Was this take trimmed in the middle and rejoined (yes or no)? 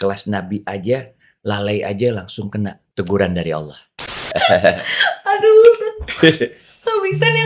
yes